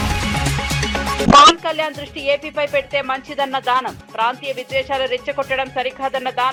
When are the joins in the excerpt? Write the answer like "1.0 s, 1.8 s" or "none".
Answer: none